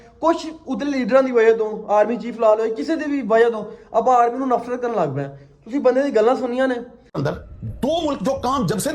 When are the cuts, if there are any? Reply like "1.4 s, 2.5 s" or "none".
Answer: 7.2 s